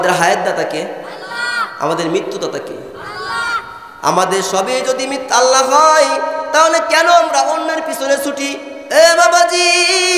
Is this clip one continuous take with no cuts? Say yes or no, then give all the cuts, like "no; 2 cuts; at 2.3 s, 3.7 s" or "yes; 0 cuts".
no; 1 cut; at 8.7 s